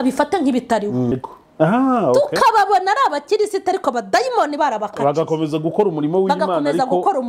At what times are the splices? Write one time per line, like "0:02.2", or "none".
0:01.1

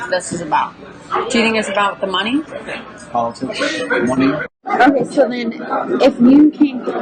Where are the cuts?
0:02.6
0:04.6

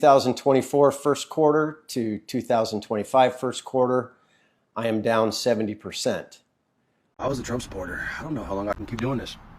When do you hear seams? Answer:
0:07.1

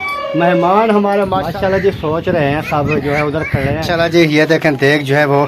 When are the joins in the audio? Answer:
0:01.4
0:03.9

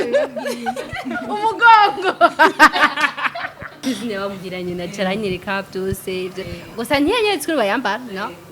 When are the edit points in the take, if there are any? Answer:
0:03.8

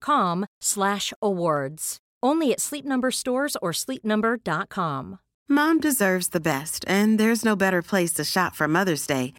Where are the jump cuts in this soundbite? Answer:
0:05.3

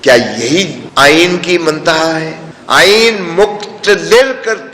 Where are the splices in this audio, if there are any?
none

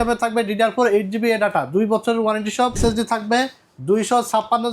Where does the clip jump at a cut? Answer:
0:02.8

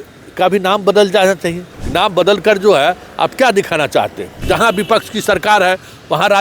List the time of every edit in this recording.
0:01.7
0:04.4

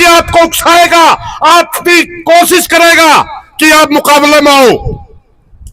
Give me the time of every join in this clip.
none

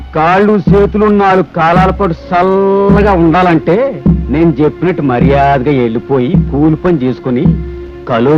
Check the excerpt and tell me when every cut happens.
none

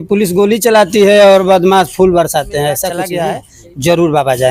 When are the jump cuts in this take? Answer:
0:03.1

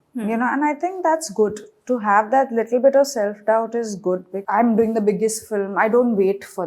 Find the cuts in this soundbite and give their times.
0:04.3

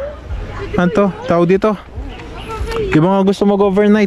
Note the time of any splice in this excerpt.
none

